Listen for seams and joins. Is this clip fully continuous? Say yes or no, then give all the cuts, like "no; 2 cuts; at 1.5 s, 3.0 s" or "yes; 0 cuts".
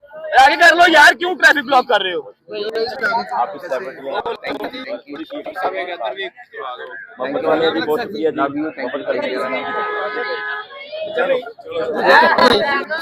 yes; 0 cuts